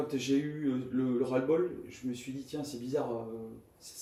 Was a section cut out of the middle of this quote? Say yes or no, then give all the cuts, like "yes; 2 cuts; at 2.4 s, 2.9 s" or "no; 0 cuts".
no; 0 cuts